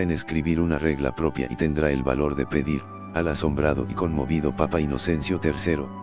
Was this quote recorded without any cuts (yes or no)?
no